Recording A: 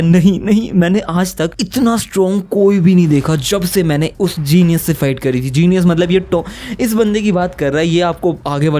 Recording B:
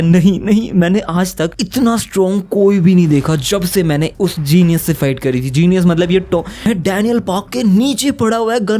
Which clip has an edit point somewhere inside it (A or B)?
B